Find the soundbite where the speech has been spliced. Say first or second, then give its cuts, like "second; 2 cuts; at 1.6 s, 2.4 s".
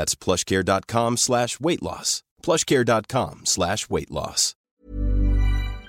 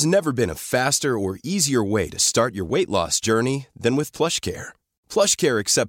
first; 1 cut; at 4.5 s